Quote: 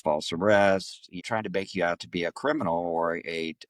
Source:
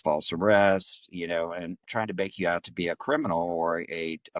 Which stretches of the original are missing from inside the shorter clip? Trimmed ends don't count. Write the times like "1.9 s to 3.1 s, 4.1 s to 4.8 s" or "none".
1.1 s to 1.8 s